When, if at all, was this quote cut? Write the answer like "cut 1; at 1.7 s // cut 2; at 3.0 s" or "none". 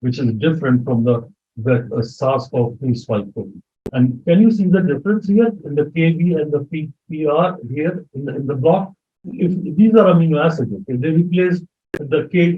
cut 1; at 9.2 s

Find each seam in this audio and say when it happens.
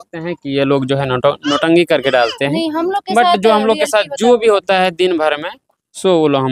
none

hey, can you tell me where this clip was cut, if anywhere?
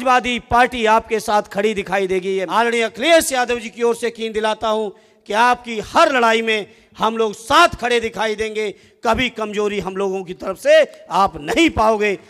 cut 1; at 2.5 s

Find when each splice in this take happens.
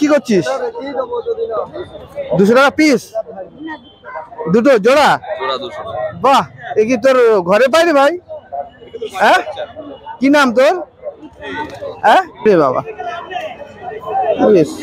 cut 1; at 12.5 s

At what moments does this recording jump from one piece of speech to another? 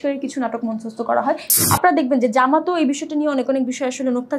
cut 1; at 1.5 s

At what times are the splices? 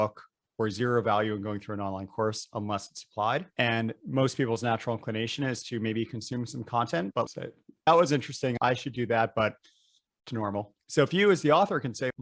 none

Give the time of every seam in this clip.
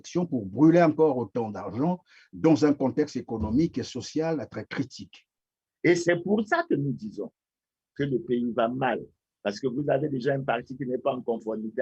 cut 1; at 5.6 s

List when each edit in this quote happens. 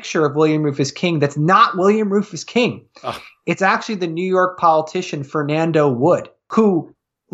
cut 1; at 6.4 s

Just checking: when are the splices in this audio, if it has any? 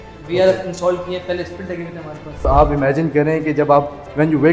cut 1; at 2.4 s

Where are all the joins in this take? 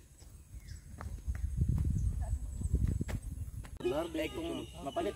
cut 1; at 3.8 s

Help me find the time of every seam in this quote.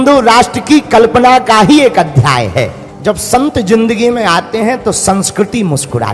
cut 1; at 2.8 s

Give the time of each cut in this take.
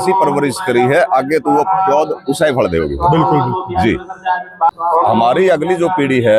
cut 1; at 4.7 s

